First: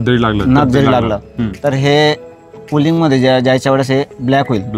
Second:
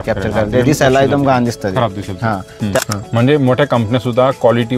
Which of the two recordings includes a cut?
second; 1 cut; at 2.8 s

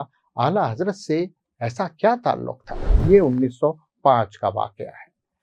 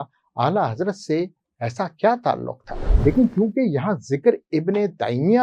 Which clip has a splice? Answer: first; 1 cut; at 3.0 s

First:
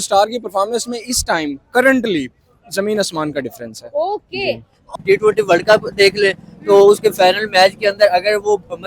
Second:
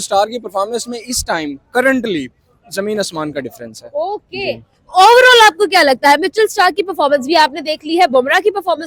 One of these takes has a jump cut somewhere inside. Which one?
first; 1 cut; at 4.9 s

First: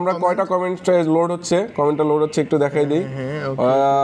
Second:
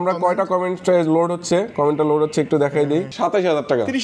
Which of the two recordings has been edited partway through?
second; 1 cut; at 3.1 s

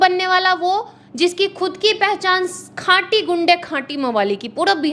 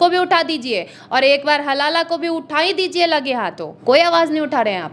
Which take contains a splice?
second; 1 cut; at 3.7 s

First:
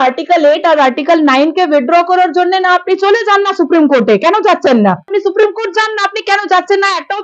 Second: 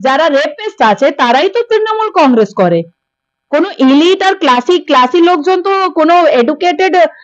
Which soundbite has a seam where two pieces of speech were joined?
first; 1 cut; at 5.1 s

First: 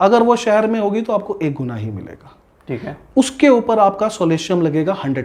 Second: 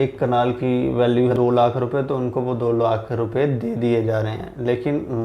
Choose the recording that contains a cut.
second; 1 cut; at 1.3 s

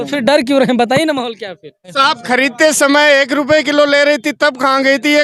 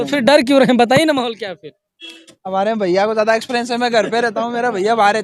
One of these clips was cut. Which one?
first; 1 cut; at 2.0 s

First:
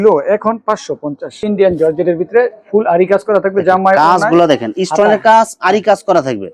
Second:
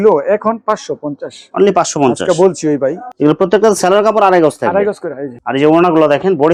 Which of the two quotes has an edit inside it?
first; 1 cut; at 1.4 s

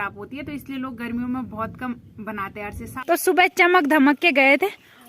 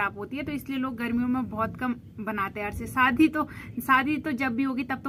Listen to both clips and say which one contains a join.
first; 1 cut; at 2.9 s

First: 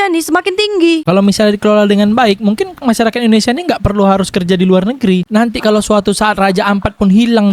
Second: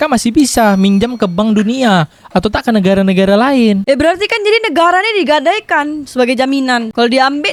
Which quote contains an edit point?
first; 2 cuts; at 1.0 s, 5.2 s

